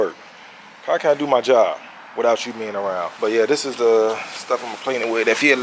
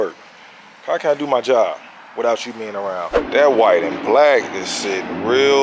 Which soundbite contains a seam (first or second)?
second